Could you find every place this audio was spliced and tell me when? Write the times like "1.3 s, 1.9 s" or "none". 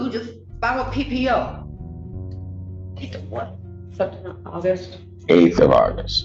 1.6 s, 2.9 s